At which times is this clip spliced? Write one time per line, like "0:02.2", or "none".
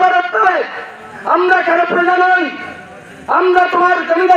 none